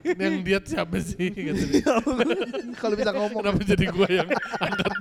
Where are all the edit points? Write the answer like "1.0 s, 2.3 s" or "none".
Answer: none